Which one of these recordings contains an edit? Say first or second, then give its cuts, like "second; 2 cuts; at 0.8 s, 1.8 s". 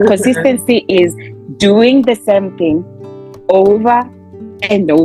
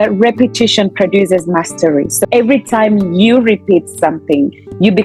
second; 1 cut; at 2.1 s